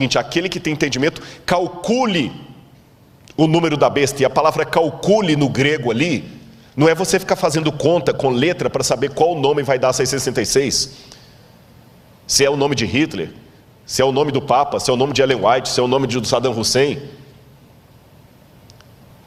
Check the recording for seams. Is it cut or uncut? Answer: uncut